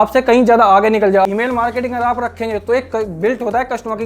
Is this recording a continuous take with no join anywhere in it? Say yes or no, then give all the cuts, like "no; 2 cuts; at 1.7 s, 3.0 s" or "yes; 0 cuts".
no; 1 cut; at 1.3 s